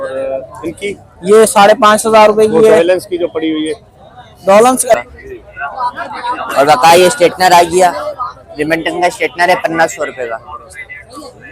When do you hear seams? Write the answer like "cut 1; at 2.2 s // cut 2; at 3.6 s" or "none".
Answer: cut 1; at 5.0 s